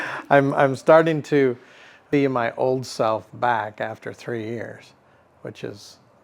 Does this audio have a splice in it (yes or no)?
yes